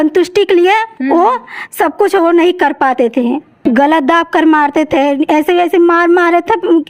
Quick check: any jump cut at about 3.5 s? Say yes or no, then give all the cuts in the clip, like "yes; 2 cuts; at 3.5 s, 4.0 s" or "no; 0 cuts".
yes; 1 cut; at 3.5 s